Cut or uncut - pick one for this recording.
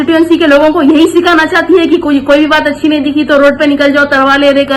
uncut